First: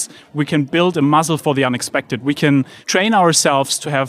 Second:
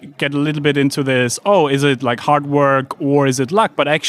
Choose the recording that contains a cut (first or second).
first